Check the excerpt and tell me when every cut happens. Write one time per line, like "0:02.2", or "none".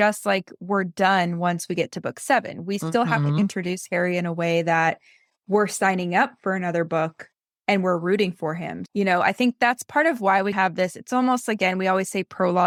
none

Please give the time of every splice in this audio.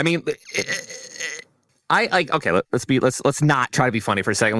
0:01.7

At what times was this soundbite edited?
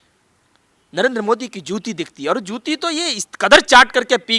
none

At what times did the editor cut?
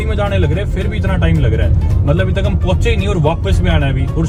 none

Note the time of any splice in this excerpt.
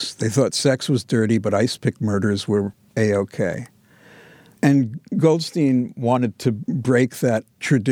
none

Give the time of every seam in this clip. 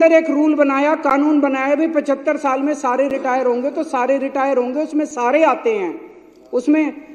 none

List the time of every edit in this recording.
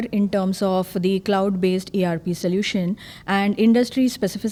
none

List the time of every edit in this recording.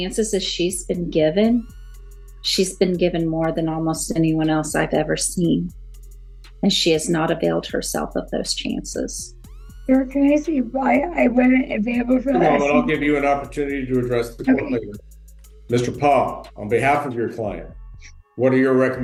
none

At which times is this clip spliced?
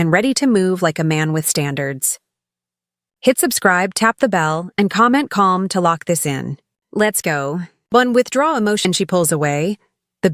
0:08.8

